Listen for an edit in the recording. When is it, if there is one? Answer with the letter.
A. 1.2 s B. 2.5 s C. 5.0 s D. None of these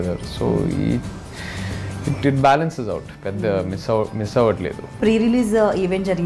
C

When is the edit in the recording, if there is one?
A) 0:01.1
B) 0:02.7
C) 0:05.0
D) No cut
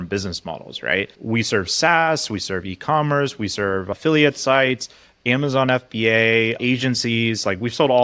A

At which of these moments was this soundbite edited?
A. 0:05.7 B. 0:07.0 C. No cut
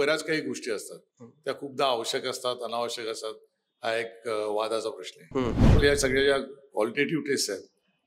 A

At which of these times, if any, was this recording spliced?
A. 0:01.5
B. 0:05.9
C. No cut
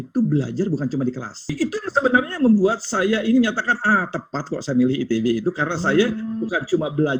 A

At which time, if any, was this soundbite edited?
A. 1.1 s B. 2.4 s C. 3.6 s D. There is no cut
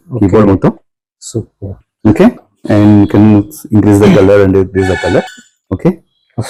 D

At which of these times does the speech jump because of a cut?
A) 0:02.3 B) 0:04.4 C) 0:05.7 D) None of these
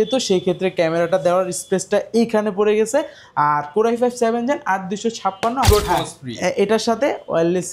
C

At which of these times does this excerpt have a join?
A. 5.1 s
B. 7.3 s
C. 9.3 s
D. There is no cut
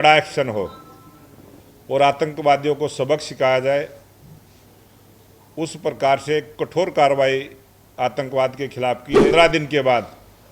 C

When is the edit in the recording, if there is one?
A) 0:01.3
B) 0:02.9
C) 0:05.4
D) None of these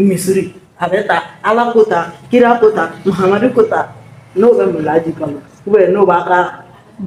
D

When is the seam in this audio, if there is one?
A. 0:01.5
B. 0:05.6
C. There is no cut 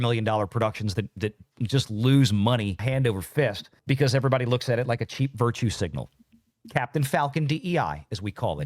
C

